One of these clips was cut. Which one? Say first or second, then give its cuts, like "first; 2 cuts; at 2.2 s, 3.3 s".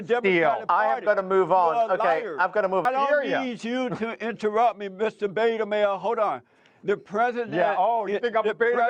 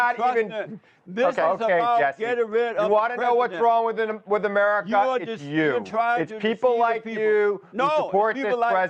first; 1 cut; at 2.8 s